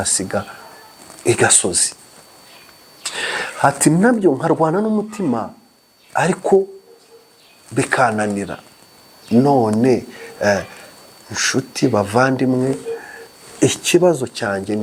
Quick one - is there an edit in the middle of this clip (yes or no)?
no